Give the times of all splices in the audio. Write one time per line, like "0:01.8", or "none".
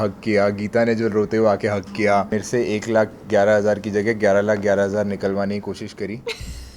0:02.4